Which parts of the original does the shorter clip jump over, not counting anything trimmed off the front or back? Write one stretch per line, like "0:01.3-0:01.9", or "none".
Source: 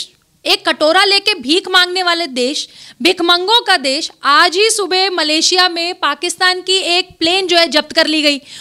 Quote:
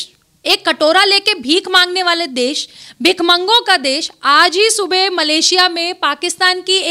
none